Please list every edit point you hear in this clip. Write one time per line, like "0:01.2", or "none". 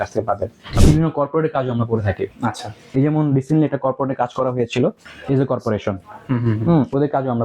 0:00.8
0:05.1